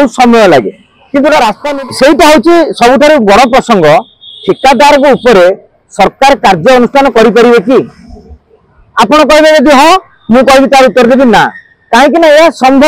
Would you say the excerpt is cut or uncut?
cut